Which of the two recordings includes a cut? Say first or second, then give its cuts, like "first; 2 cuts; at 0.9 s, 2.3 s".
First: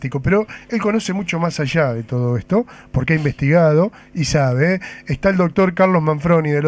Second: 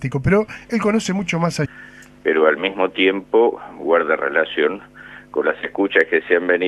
first; 1 cut; at 1.7 s